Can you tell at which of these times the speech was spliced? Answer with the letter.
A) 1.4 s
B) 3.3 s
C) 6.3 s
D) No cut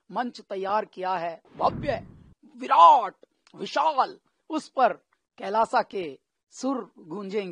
A